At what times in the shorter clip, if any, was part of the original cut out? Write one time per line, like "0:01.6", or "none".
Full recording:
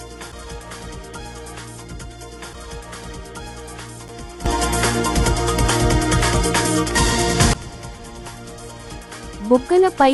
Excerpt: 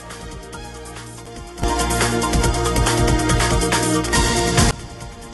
0:01.2